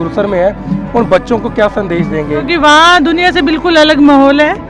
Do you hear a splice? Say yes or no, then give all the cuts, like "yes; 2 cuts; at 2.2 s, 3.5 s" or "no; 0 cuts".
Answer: yes; 1 cut; at 2.5 s